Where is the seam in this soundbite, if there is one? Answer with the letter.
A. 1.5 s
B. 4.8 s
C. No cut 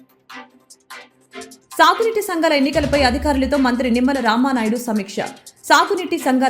A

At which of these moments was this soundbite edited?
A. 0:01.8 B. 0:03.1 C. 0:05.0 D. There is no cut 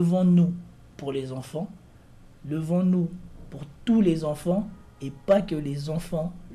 D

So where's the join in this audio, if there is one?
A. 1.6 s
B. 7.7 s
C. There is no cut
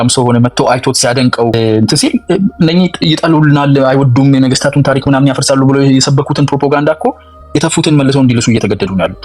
A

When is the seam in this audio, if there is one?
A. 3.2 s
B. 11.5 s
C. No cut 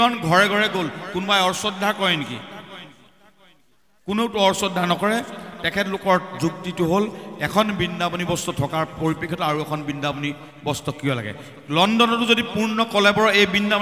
C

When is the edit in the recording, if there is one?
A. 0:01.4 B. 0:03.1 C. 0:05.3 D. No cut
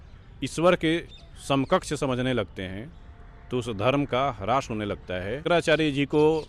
C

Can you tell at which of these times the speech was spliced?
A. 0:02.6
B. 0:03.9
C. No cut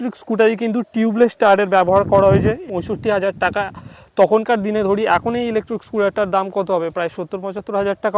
A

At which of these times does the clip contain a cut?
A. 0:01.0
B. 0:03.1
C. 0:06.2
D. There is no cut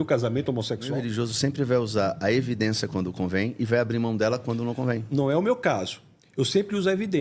A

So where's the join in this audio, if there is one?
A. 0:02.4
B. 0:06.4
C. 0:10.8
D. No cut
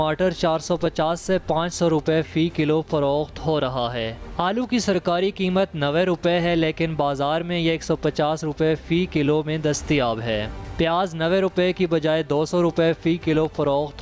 D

